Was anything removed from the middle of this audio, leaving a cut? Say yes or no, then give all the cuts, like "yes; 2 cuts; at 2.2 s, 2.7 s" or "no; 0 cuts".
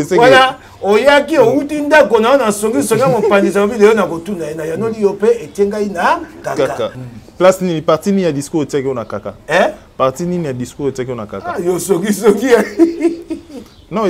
yes; 1 cut; at 7.0 s